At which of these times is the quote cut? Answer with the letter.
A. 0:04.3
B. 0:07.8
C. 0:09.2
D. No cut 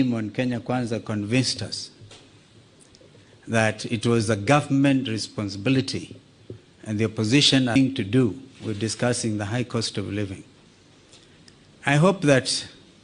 B